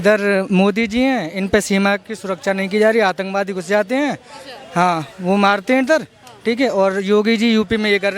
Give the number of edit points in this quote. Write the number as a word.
zero